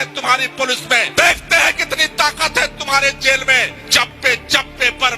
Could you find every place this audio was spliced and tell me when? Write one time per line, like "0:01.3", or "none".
0:01.1
0:03.8